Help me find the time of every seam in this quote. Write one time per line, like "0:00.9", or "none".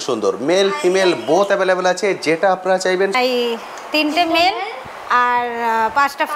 0:03.1